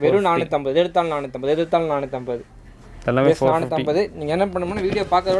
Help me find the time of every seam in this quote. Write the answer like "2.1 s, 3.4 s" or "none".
none